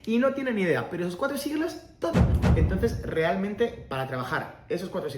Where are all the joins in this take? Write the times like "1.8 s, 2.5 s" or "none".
2.4 s